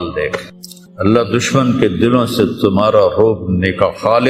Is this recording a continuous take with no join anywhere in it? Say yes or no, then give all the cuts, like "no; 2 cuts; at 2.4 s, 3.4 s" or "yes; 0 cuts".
yes; 0 cuts